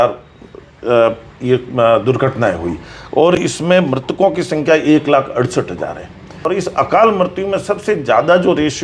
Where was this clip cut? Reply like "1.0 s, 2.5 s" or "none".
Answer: 6.4 s